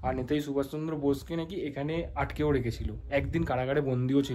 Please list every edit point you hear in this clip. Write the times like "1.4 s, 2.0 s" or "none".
none

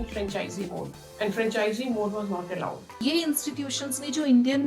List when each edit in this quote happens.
1.0 s, 3.0 s

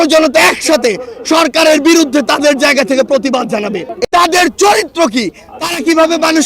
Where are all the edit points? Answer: 3.9 s

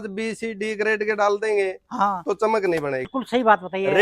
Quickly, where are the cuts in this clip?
3.1 s

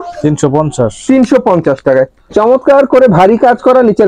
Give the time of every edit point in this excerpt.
2.2 s

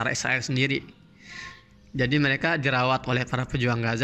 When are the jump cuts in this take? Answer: none

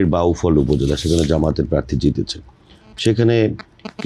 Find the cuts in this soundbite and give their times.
none

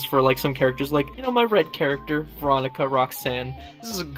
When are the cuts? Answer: 1.2 s

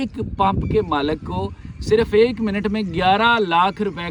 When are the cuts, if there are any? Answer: none

